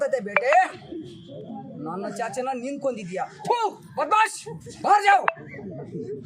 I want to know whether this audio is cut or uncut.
uncut